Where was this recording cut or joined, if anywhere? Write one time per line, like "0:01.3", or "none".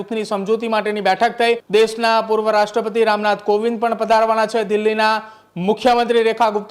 0:01.6